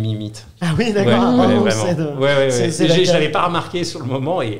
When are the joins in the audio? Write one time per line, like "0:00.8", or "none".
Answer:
none